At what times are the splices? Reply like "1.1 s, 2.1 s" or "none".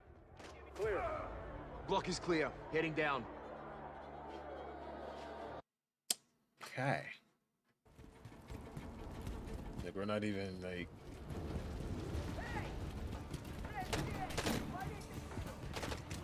7.8 s